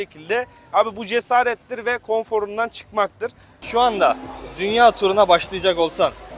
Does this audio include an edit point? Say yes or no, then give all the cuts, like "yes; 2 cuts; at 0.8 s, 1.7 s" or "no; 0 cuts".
yes; 1 cut; at 3.5 s